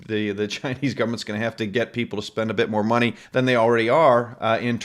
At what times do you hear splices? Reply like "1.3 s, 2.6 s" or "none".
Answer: 3.2 s